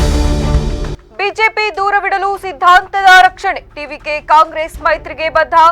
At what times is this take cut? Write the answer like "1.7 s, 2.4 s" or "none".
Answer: 0.9 s